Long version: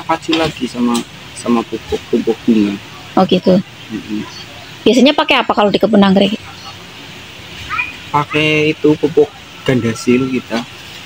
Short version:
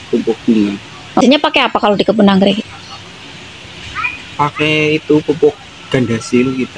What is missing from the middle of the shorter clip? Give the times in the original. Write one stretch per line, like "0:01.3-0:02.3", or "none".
0:03.2-0:05.0